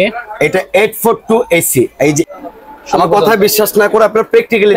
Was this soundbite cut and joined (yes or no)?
yes